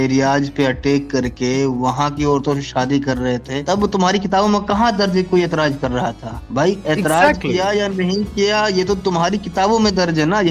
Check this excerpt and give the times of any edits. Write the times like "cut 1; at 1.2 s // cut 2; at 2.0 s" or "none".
none